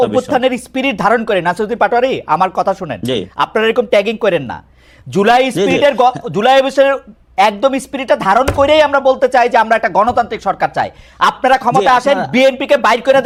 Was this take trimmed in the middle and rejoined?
no; 0 cuts

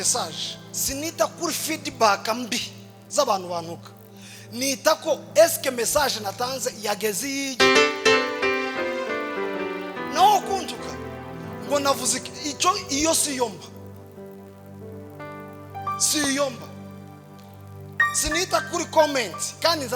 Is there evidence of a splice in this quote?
no; 0 cuts

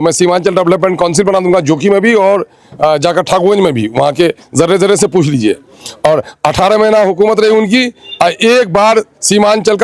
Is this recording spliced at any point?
no; 0 cuts

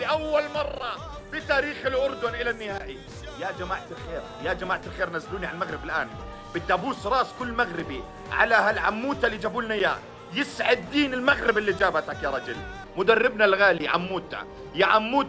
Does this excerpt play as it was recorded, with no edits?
yes; 0 cuts

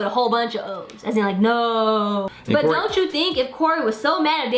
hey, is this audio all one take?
no; 1 cut; at 2.3 s

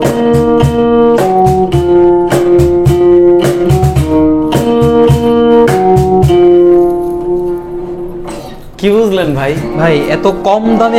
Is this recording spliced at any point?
no; 0 cuts

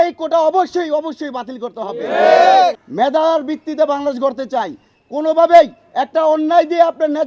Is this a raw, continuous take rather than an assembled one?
no; 1 cut; at 2.8 s

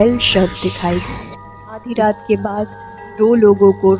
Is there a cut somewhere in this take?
yes; 1 cut; at 1.8 s

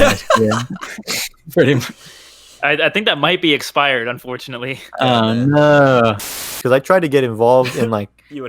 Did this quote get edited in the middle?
yes; 1 cut; at 6.3 s

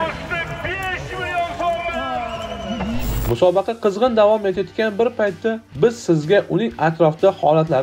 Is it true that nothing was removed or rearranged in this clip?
no; 1 cut; at 3.1 s

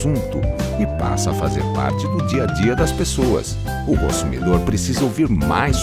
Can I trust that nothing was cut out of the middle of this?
yes; 0 cuts

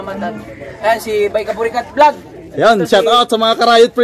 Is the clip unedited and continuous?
yes; 0 cuts

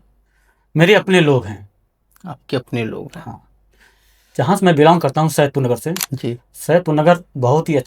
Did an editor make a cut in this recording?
no; 0 cuts

